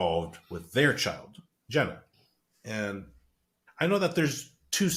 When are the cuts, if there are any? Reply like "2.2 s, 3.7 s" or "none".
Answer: none